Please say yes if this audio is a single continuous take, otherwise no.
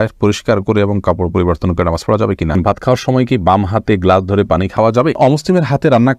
no